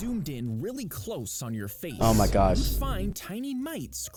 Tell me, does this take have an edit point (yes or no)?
no